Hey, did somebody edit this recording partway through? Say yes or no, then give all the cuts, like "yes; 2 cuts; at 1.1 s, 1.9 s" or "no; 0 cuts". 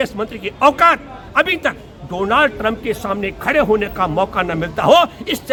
no; 0 cuts